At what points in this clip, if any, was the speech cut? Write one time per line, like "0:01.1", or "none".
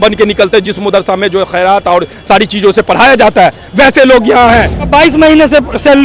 0:04.9

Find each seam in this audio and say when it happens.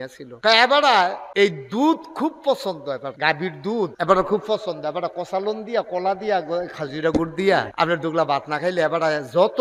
none

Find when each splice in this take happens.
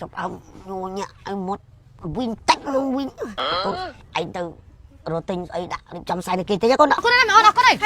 0:03.6
0:07.0

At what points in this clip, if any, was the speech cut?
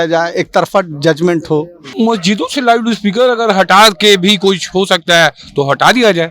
0:01.8

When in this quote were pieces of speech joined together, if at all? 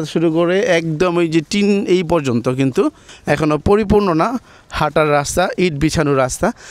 0:03.1

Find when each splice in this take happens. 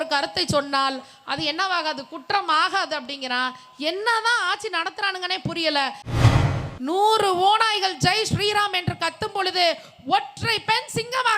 0:06.2

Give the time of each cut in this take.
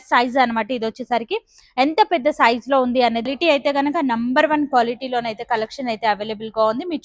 0:03.3

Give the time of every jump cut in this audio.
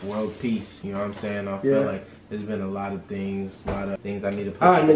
0:04.0

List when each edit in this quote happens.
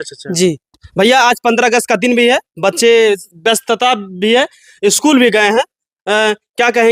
none

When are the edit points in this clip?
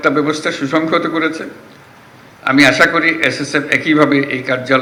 none

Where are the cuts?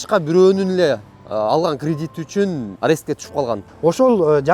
0:02.7
0:03.6

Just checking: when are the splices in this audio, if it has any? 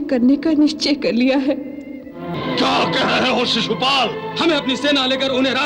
0:02.3

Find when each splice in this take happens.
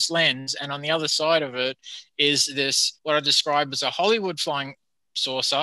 0:02.9

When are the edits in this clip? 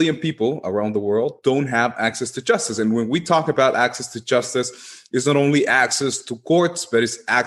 none

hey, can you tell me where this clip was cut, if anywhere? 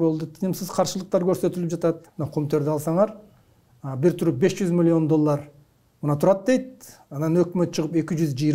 0:02.1

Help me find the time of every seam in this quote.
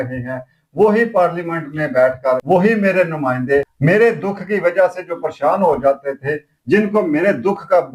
0:02.4
0:03.7

